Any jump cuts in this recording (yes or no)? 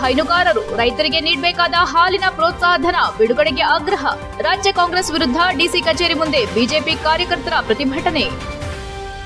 no